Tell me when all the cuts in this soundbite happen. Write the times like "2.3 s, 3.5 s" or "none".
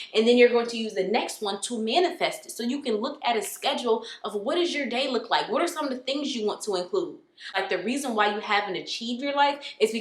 7.6 s